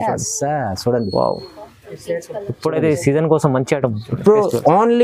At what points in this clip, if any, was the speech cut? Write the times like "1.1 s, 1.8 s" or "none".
none